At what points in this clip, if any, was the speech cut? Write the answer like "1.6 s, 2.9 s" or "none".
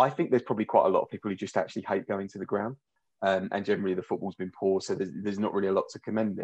2.9 s